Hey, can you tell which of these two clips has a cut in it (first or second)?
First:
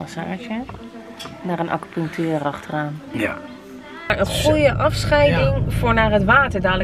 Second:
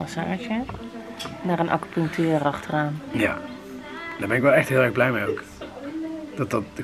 first